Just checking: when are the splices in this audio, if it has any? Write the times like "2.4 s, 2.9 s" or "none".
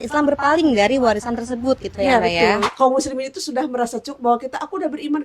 2.7 s